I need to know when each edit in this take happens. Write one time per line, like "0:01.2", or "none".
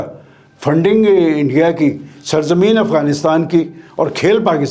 none